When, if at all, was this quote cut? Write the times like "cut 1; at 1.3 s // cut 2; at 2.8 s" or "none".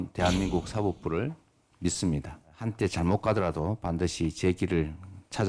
cut 1; at 2.6 s